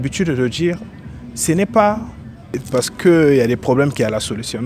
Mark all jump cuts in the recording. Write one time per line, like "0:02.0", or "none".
0:02.6